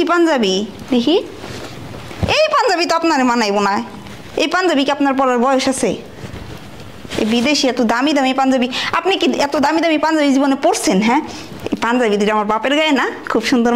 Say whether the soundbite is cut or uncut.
uncut